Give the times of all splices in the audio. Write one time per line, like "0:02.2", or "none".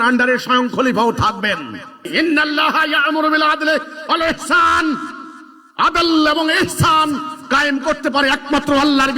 0:02.1